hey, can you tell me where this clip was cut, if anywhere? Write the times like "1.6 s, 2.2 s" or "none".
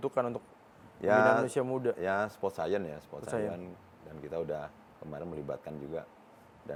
none